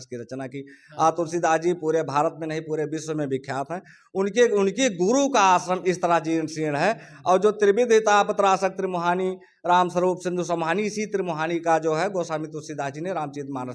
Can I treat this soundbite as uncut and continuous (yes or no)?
yes